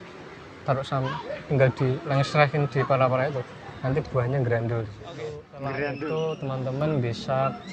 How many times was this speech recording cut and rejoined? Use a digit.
1